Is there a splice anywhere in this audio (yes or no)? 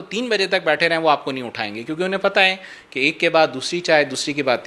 no